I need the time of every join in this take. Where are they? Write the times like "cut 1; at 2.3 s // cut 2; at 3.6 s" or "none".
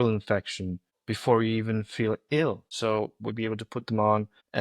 cut 1; at 2.7 s